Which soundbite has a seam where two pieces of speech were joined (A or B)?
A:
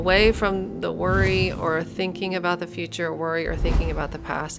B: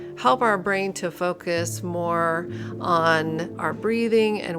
B